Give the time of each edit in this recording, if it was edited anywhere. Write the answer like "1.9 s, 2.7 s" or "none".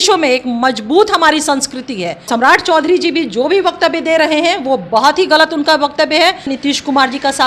2.3 s, 6.5 s